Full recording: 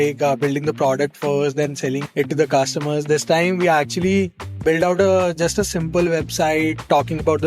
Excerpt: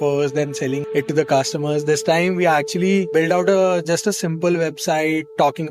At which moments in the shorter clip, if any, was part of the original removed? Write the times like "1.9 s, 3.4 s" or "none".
3.1 s